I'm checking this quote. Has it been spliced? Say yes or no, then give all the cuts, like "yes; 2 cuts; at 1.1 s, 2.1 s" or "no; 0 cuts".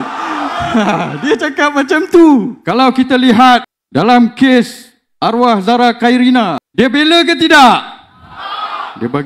yes; 3 cuts; at 2.6 s, 3.8 s, 6.6 s